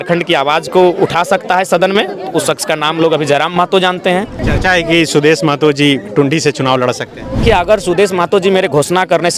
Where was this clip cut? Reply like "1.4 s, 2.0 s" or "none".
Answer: 4.4 s, 7.4 s